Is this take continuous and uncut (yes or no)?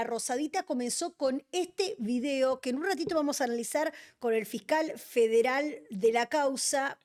yes